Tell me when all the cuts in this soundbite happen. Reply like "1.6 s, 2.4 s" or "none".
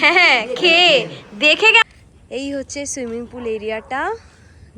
1.8 s